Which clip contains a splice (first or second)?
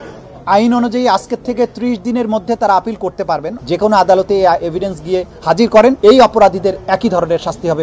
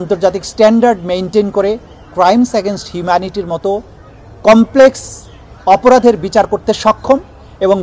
first